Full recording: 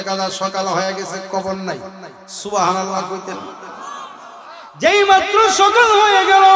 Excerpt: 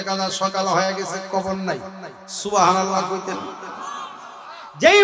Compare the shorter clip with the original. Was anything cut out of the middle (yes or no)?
no